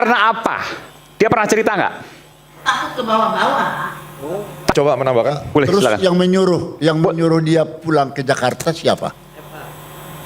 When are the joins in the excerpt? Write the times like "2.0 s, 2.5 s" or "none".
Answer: 4.7 s